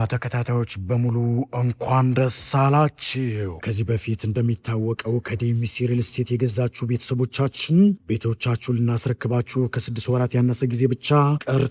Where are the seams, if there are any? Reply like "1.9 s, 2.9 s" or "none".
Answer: none